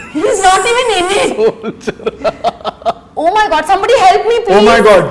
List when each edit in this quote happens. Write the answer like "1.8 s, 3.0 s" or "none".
none